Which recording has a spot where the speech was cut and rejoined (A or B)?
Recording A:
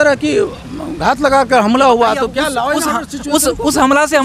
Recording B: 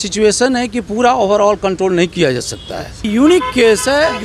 B